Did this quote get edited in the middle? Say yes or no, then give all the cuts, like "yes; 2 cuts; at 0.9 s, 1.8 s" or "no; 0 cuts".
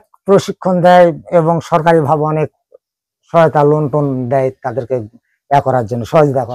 no; 0 cuts